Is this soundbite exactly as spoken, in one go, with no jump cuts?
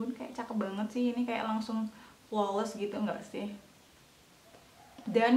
yes; 0 cuts

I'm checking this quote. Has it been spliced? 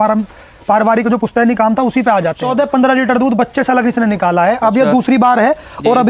yes; 1 cut; at 2.4 s

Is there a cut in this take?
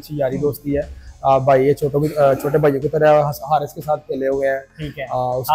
no; 0 cuts

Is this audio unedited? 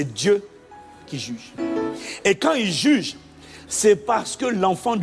no; 1 cut; at 1.5 s

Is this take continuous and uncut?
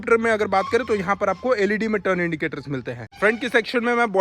no; 1 cut; at 3.0 s

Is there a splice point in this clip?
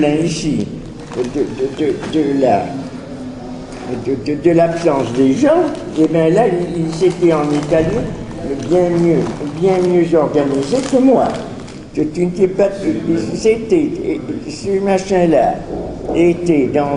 yes; 1 cut; at 14.5 s

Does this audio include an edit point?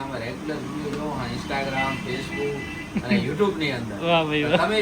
no; 0 cuts

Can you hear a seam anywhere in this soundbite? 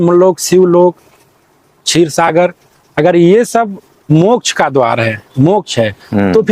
no; 0 cuts

